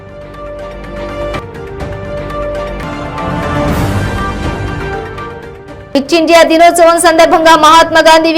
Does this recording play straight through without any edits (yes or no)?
no